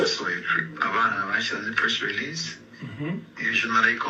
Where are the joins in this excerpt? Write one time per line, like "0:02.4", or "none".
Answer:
none